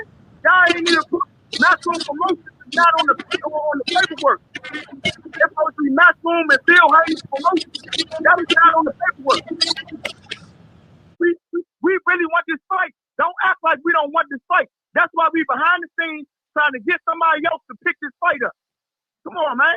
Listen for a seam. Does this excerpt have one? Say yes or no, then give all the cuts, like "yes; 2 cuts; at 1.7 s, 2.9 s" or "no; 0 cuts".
no; 0 cuts